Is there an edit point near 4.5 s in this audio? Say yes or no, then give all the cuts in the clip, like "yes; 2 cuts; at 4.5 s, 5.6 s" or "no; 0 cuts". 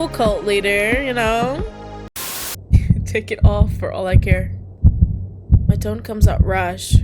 no; 1 cut; at 2.2 s